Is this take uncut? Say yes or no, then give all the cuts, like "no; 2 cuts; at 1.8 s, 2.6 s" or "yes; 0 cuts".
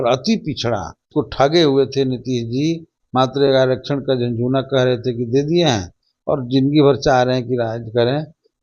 no; 1 cut; at 1.0 s